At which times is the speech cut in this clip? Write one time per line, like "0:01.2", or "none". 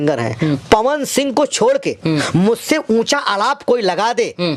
none